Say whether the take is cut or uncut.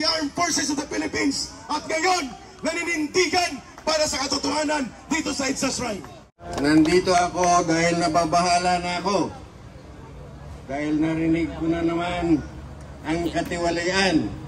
cut